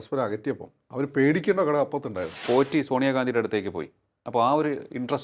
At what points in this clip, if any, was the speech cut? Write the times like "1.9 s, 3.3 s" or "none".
2.3 s